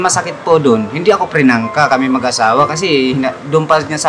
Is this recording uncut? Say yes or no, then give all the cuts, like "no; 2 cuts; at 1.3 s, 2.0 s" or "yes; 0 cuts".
yes; 0 cuts